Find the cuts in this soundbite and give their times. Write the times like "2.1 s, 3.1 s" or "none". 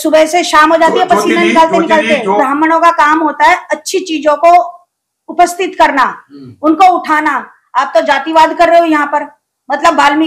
2.4 s